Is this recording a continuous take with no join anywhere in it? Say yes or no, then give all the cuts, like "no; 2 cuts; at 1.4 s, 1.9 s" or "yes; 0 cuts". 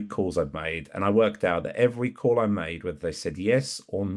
yes; 0 cuts